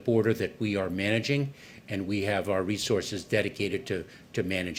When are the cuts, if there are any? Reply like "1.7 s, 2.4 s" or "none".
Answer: none